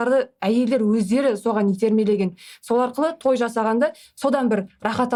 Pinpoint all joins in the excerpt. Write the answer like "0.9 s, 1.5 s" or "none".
none